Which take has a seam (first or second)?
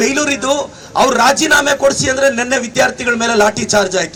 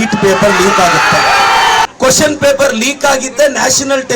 second